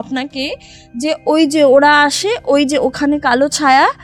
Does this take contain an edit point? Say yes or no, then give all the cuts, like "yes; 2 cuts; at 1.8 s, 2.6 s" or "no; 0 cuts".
no; 0 cuts